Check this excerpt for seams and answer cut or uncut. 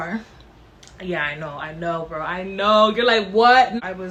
uncut